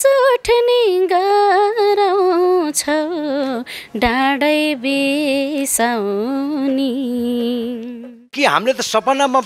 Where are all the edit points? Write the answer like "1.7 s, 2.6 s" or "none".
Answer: 8.3 s

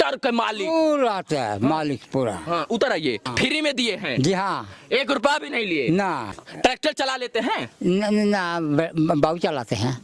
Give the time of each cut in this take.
3.3 s, 6.4 s

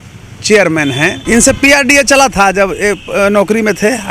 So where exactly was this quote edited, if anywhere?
1.2 s

